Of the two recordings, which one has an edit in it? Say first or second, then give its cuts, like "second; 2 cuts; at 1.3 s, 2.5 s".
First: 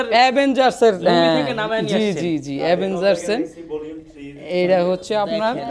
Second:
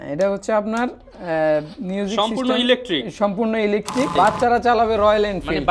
second; 1 cut; at 4.2 s